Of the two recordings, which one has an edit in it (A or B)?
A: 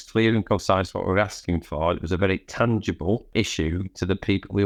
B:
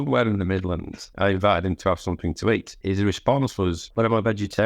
B